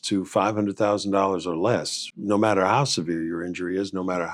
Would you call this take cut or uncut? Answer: uncut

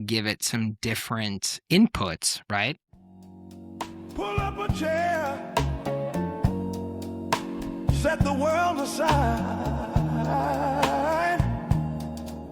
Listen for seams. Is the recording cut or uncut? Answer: cut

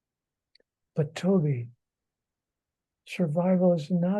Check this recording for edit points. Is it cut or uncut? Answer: uncut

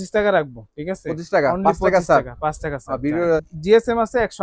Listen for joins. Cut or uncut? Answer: cut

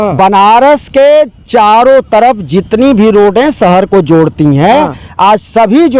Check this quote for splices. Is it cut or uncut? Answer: uncut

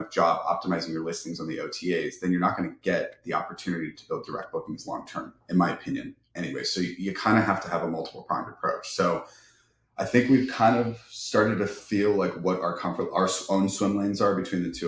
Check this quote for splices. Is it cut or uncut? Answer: uncut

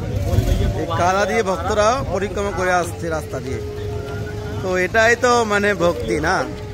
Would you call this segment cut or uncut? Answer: uncut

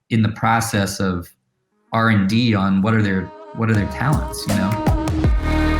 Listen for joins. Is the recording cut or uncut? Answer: cut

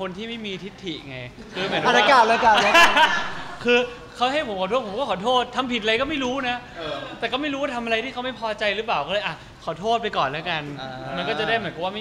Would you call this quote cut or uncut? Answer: uncut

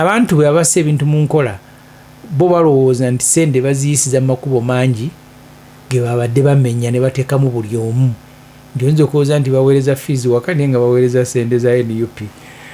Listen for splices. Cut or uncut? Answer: uncut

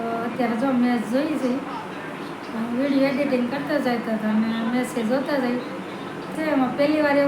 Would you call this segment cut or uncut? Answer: cut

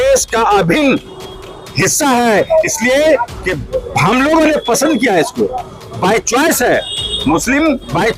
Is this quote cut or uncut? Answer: uncut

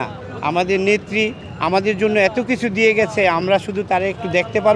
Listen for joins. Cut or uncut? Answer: uncut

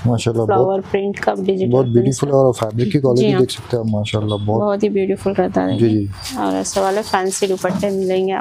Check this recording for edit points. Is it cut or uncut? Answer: uncut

